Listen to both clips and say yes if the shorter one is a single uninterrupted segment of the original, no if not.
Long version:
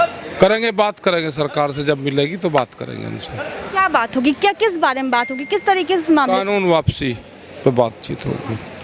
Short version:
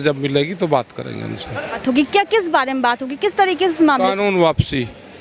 no